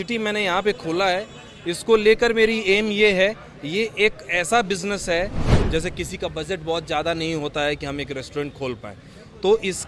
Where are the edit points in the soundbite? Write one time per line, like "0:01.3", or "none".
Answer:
0:05.5